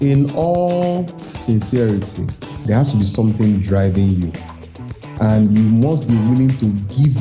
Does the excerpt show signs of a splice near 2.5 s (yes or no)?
yes